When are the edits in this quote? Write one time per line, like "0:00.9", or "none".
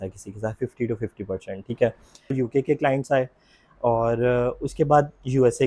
0:02.3